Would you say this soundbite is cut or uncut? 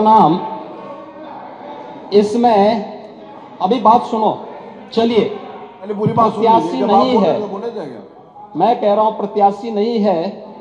uncut